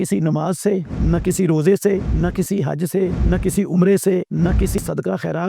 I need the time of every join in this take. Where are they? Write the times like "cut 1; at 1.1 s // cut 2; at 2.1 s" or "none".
cut 1; at 0.9 s // cut 2; at 2.1 s // cut 3; at 3.2 s // cut 4; at 4.8 s